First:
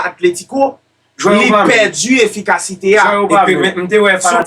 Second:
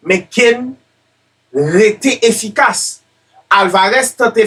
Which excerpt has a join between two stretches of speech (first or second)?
first